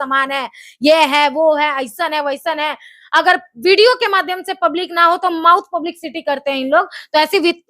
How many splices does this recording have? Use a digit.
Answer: 0